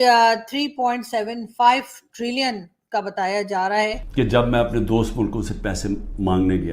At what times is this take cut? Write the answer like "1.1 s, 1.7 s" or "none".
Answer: 4.0 s